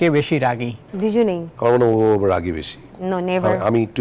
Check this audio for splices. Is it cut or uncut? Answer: cut